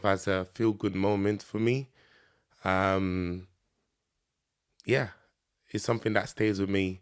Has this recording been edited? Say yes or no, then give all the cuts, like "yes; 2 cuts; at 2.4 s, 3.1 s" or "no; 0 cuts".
no; 0 cuts